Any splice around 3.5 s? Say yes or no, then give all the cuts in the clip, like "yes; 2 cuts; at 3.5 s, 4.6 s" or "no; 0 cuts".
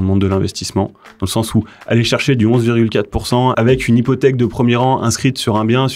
yes; 1 cut; at 3.5 s